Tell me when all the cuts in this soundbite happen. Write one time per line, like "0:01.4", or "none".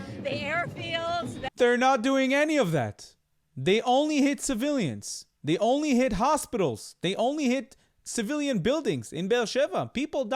0:01.5